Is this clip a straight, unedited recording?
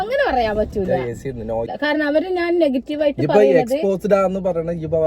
no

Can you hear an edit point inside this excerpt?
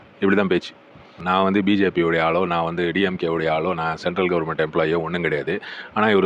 yes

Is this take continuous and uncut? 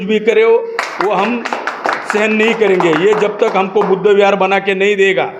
yes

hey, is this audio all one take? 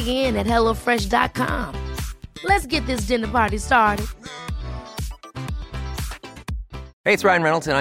no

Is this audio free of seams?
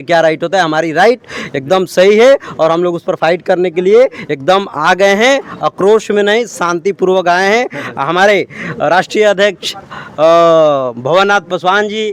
yes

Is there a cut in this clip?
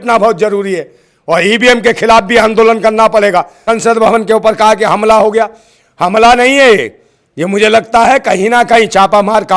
yes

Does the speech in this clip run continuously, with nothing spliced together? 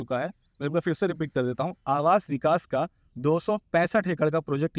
yes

